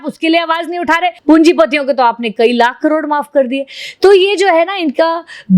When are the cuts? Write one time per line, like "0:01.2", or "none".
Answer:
0:01.1